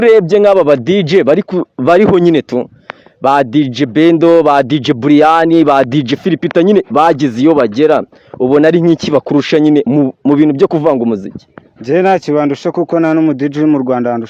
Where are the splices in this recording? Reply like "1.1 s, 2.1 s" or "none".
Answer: none